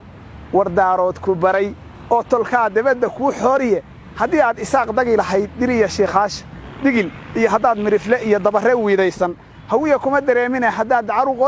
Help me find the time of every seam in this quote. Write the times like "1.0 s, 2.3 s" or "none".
none